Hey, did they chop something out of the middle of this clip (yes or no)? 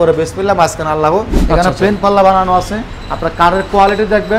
yes